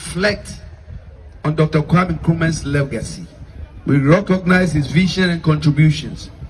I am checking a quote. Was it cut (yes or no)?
no